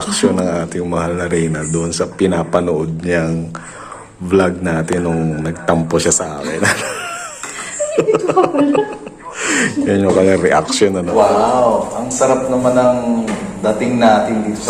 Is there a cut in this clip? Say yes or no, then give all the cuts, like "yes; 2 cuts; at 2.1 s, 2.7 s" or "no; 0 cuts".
yes; 1 cut; at 11.1 s